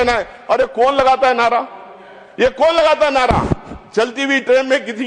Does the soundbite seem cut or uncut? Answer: uncut